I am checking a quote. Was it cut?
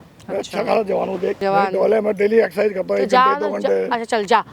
yes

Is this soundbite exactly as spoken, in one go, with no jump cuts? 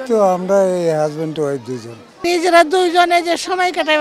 no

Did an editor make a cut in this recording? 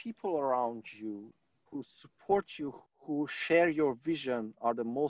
yes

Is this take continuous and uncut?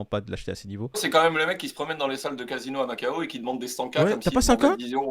no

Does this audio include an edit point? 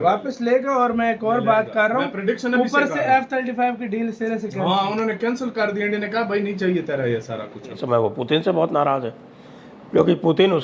yes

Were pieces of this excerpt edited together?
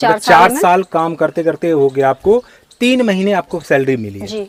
no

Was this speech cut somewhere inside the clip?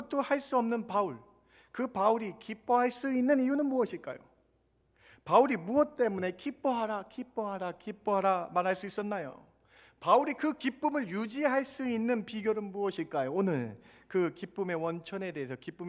no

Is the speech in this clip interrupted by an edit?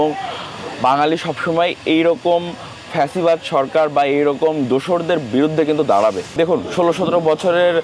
yes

